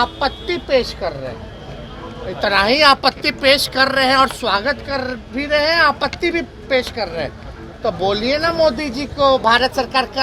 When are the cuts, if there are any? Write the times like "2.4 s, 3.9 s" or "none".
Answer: none